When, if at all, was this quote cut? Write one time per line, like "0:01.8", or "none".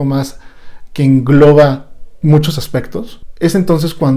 0:03.2